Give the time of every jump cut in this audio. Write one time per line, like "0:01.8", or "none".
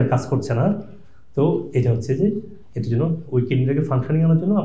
none